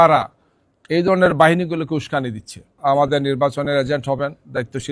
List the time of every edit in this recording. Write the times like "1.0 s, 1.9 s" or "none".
2.8 s